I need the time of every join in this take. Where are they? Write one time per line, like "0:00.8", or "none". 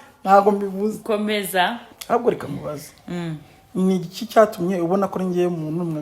0:01.8